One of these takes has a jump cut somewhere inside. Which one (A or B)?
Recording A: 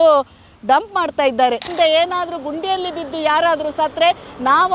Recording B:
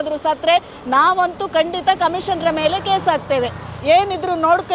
A